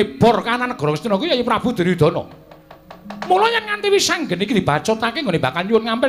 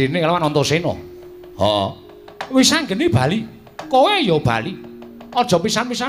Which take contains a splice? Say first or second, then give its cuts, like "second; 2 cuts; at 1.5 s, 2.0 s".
first; 1 cut; at 5.1 s